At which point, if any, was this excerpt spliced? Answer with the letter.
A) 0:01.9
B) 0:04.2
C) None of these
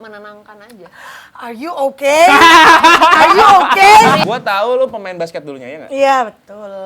B